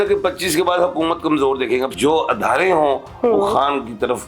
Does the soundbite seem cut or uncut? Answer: cut